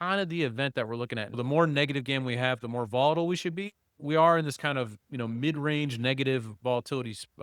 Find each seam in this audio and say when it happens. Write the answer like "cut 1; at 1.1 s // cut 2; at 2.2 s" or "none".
cut 1; at 1.4 s // cut 2; at 4.0 s